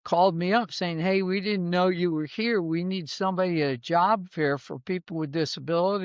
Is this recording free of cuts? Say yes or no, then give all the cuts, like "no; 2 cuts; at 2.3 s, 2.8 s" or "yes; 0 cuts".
yes; 0 cuts